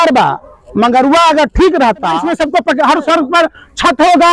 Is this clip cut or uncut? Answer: cut